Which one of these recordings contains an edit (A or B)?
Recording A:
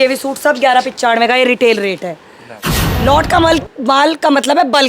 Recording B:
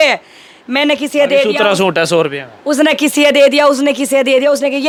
A